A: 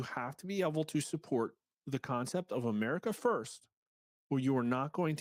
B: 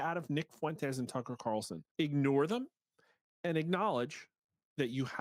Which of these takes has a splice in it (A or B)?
B